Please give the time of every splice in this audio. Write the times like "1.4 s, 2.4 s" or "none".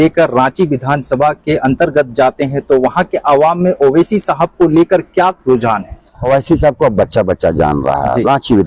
6.2 s